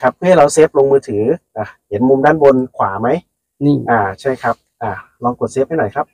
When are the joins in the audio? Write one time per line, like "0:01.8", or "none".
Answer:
none